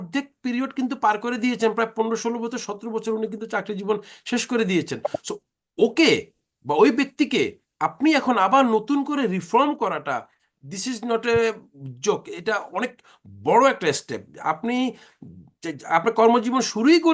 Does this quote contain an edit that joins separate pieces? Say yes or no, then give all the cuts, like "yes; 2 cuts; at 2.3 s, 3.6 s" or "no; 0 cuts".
no; 0 cuts